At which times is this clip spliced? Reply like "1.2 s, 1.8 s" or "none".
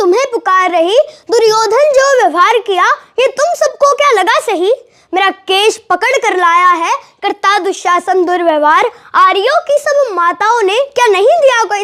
none

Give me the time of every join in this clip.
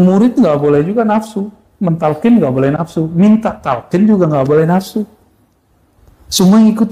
none

